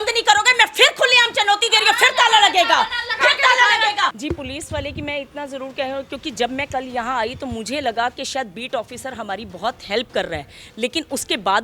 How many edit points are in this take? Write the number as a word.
one